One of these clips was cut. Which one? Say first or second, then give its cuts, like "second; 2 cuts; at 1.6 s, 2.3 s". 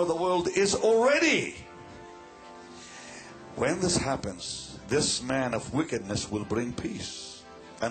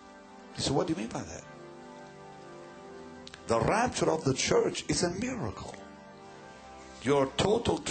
first; 1 cut; at 2.8 s